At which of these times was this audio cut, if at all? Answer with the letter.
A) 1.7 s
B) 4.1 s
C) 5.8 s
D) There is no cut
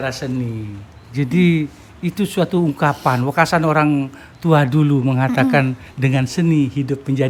D